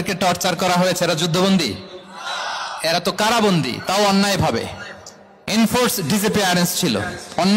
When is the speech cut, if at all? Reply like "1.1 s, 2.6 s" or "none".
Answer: none

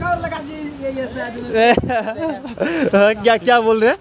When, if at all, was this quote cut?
none

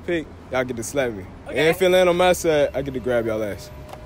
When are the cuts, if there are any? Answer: 1.3 s

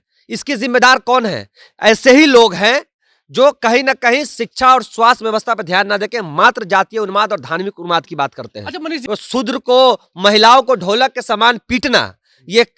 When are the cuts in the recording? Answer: 9.0 s

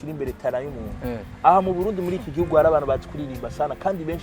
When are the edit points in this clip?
none

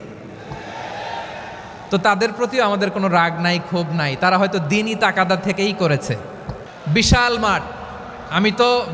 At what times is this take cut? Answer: 6.7 s

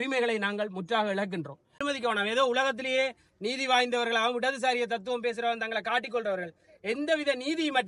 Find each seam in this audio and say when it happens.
1.8 s

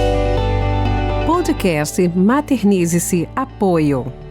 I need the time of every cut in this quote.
1.2 s

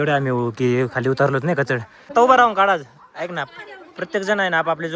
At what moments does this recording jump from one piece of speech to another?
1.9 s

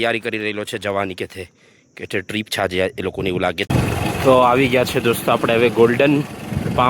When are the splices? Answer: 3.7 s

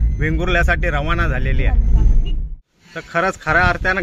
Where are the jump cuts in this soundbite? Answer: 2.7 s

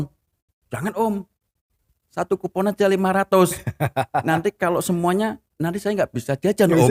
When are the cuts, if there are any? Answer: none

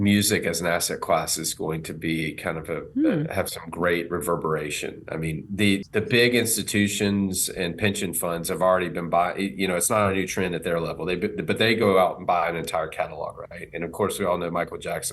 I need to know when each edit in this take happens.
5.8 s

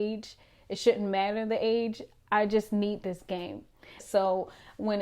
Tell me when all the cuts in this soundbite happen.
4.0 s

